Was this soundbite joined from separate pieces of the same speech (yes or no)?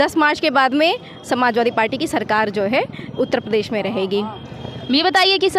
no